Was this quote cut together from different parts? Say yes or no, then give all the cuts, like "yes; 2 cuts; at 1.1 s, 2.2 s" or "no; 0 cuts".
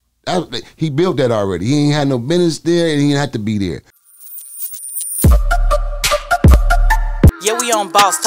yes; 1 cut; at 3.9 s